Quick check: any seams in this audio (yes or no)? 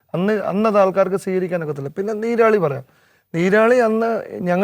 no